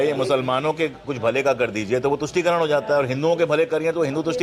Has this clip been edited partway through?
no; 0 cuts

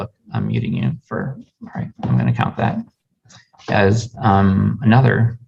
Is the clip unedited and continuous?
yes; 0 cuts

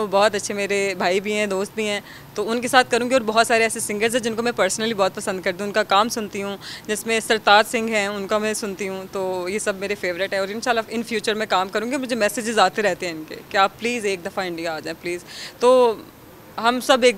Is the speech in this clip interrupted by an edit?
no; 0 cuts

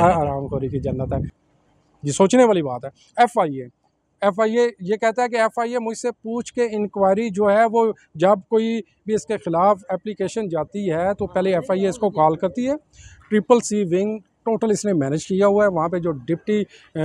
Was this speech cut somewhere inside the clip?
yes; 1 cut; at 1.3 s

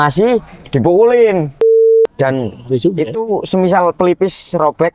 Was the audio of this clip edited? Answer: yes; 1 cut; at 1.9 s

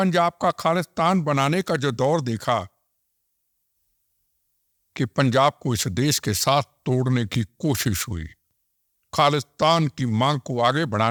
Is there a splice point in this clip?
no; 0 cuts

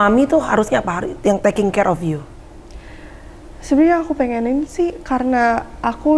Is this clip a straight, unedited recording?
yes; 0 cuts

